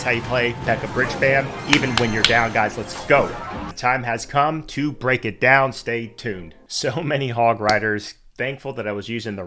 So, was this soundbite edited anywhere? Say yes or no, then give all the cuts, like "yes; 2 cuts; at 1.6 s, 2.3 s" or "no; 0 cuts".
no; 0 cuts